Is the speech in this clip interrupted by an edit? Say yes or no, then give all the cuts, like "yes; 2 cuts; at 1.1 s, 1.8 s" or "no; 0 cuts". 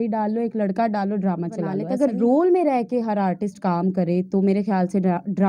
yes; 1 cut; at 1.8 s